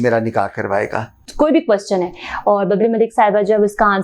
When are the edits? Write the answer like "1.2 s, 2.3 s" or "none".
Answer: 1.2 s